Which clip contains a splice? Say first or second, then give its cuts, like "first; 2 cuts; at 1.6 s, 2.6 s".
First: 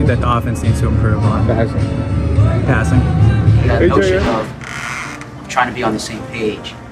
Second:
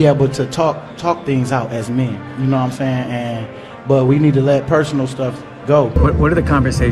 second; 1 cut; at 5.9 s